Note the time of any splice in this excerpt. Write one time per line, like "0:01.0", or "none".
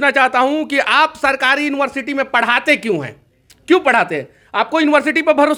none